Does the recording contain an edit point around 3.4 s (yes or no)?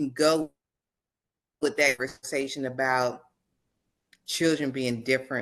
no